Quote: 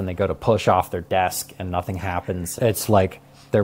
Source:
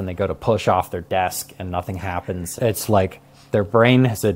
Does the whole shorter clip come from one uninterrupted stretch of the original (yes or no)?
yes